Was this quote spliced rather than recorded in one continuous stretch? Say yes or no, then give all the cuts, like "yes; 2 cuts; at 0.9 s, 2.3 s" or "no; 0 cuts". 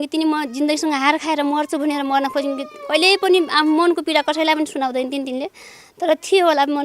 no; 0 cuts